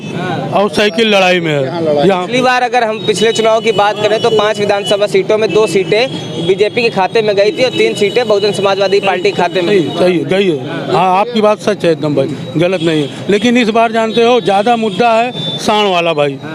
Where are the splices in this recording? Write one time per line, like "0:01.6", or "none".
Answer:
none